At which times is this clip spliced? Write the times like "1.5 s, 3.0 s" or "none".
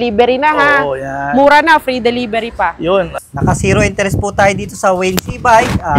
3.1 s